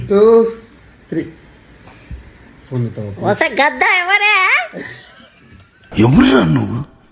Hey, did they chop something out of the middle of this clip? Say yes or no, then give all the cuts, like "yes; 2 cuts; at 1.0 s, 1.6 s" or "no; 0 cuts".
no; 0 cuts